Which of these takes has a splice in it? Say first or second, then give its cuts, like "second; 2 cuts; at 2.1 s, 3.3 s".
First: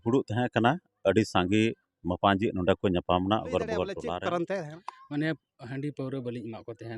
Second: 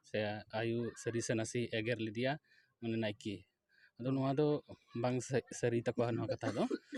first; 1 cut; at 4.0 s